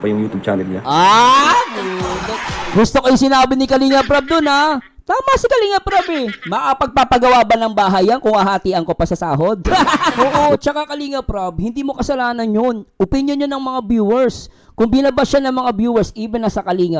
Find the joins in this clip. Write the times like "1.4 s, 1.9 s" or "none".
10.0 s